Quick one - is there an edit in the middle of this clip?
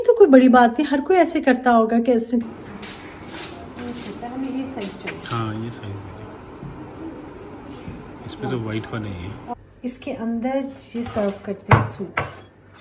yes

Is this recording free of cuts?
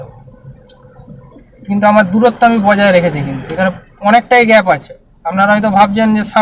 yes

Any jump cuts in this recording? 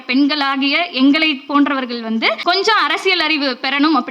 yes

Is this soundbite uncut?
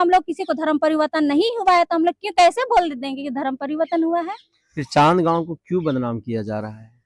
yes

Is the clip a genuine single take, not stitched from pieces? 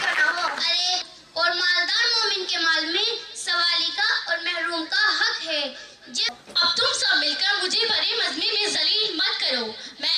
no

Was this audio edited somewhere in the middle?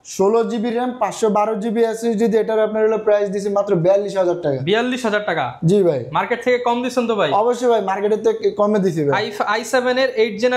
no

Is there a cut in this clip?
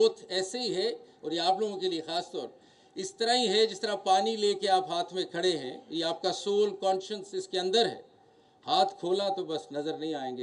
no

